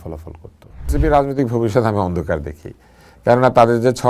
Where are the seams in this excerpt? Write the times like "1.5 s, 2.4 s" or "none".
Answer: 0.9 s